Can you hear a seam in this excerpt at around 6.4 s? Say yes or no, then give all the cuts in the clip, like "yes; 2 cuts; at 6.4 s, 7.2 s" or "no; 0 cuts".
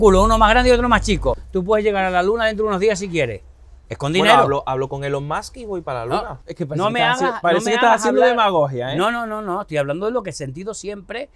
yes; 2 cuts; at 1.5 s, 6.4 s